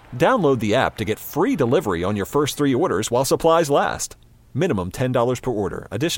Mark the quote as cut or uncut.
uncut